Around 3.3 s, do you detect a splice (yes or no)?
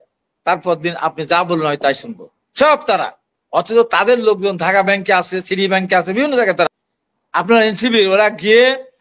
no